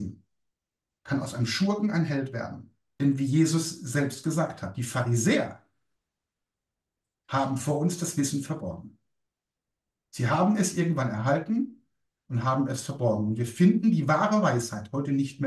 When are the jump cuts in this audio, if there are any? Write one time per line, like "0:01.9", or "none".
0:02.8